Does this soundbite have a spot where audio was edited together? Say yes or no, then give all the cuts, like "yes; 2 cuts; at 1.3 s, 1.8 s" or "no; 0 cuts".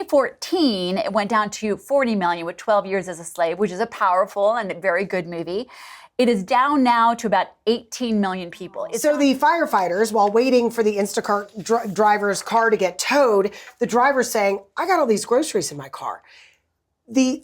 yes; 1 cut; at 8.8 s